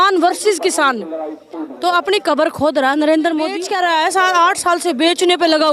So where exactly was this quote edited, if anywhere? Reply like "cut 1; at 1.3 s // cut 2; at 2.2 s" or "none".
cut 1; at 3.6 s